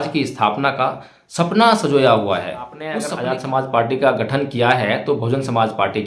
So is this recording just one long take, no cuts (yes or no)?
no